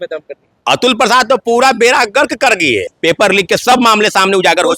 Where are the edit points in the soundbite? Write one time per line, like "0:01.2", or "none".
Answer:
0:02.9